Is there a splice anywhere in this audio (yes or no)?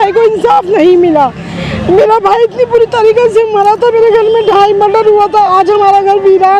no